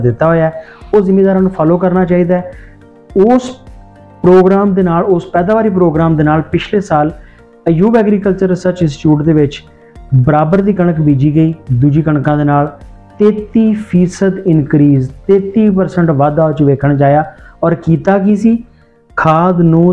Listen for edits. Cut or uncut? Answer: uncut